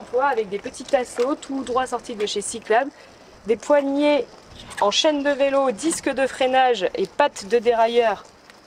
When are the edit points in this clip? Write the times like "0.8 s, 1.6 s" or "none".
none